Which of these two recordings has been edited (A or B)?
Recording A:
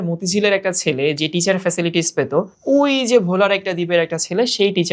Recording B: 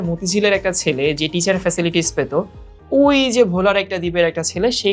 A